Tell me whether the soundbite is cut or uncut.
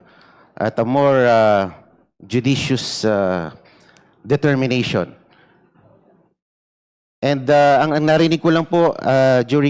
uncut